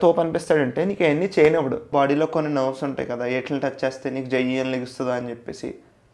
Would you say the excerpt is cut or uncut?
cut